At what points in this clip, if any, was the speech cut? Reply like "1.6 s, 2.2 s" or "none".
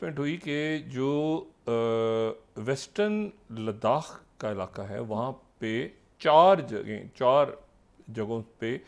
none